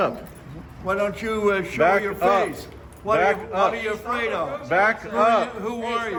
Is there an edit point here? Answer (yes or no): no